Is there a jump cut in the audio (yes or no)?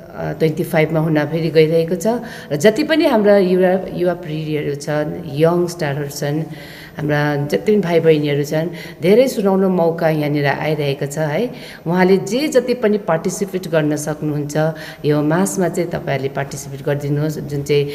no